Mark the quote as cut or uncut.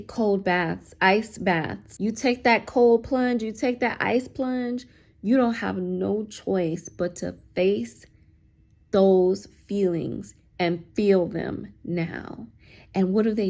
cut